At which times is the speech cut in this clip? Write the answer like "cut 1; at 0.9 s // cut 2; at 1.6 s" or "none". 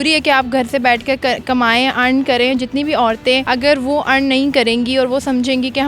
cut 1; at 3.4 s